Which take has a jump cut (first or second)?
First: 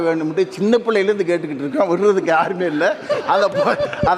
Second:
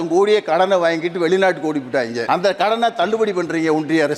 second